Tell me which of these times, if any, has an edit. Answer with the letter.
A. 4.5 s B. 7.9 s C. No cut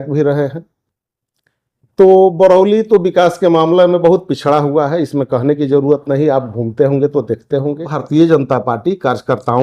B